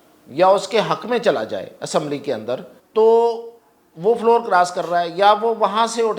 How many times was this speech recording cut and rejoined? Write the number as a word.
one